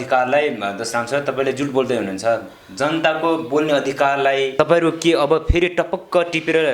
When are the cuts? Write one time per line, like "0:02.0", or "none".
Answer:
0:04.5